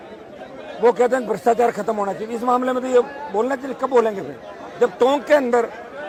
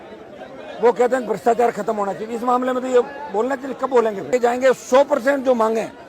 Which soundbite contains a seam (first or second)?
second